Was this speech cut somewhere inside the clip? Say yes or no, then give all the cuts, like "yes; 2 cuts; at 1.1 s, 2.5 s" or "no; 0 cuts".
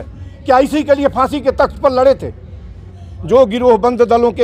yes; 1 cut; at 2.9 s